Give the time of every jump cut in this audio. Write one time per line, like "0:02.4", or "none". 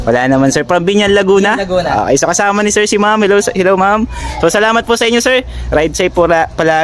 none